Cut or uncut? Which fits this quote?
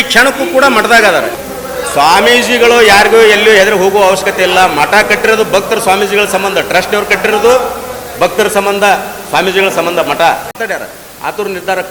cut